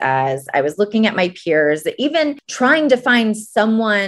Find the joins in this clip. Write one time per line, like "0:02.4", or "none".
0:02.4